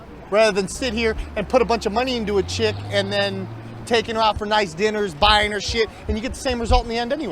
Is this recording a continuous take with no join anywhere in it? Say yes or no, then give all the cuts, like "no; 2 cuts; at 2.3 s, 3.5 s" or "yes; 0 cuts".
no; 1 cut; at 2.8 s